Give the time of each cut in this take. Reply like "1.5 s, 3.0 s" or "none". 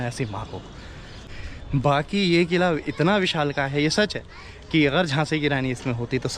1.3 s